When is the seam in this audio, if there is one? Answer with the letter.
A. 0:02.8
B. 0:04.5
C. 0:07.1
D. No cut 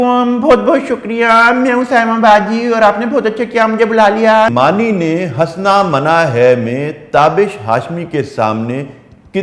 B